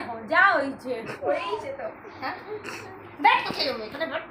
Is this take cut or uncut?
uncut